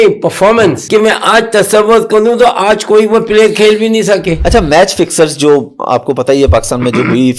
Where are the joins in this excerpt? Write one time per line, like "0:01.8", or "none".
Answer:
0:00.8
0:04.4